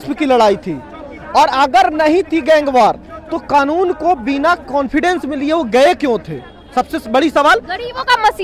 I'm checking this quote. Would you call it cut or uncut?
uncut